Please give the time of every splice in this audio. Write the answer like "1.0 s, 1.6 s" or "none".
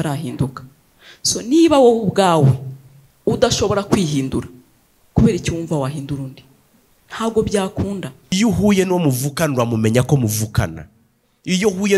8.3 s